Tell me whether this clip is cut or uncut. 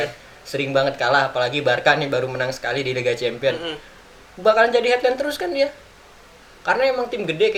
uncut